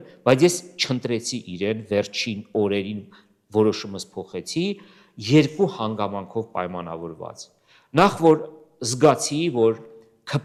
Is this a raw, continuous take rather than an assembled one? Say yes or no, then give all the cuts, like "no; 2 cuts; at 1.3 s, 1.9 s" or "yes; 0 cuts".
yes; 0 cuts